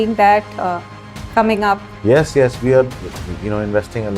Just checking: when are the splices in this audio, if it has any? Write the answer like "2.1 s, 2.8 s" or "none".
1.9 s